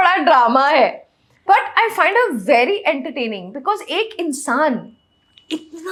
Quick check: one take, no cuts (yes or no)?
yes